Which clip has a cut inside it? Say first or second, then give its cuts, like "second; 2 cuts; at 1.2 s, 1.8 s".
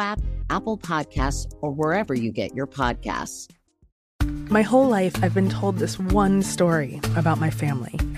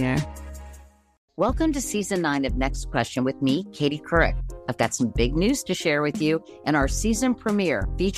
first; 1 cut; at 4.1 s